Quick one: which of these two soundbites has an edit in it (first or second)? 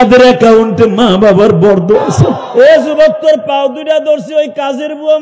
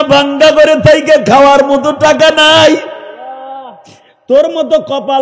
first